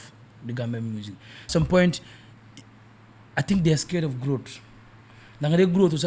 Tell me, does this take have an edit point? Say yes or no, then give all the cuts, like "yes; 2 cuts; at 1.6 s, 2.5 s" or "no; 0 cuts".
yes; 1 cut; at 1.5 s